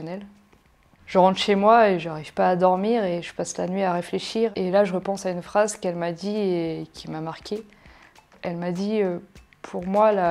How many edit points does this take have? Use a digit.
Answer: 1